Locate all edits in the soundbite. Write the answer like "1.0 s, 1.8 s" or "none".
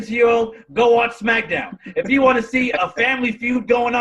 2.8 s